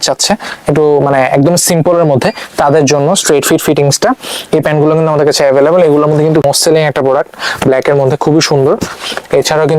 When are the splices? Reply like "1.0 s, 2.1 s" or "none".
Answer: 6.4 s